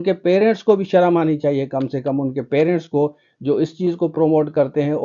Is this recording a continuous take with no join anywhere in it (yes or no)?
yes